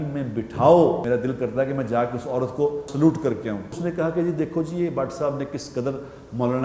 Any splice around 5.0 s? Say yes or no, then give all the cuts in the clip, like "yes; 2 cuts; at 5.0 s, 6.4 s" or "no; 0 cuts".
no; 3 cuts; at 1.0 s, 2.9 s, 3.8 s